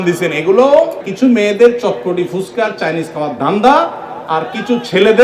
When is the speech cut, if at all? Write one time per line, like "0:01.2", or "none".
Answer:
0:01.0